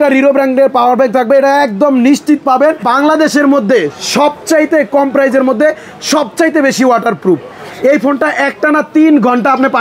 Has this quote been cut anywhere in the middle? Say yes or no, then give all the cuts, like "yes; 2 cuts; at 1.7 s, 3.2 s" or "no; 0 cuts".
yes; 1 cut; at 2.9 s